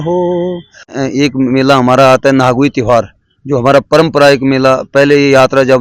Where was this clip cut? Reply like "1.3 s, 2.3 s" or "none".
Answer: 0.9 s